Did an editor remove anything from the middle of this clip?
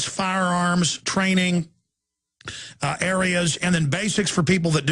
yes; 1 cut; at 1.9 s

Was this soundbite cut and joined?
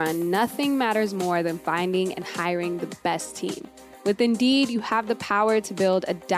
no; 0 cuts

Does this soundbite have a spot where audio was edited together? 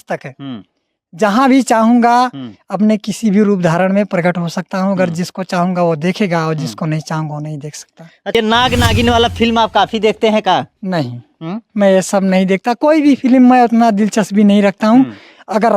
yes; 1 cut; at 8.3 s

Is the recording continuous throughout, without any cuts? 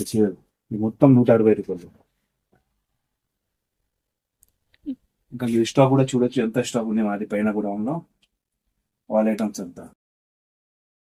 yes; 0 cuts

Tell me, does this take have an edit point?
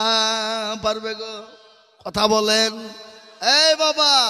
no; 0 cuts

